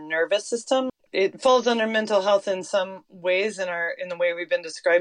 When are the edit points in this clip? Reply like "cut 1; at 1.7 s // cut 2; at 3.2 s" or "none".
cut 1; at 1.5 s

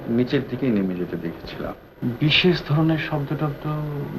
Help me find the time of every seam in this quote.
cut 1; at 1.8 s

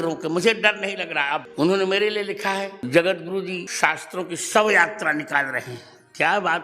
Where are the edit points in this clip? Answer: cut 1; at 1.5 s

